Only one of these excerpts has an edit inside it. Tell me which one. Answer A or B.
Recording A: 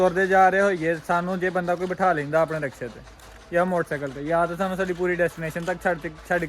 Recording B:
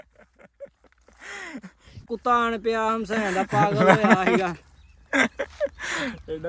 B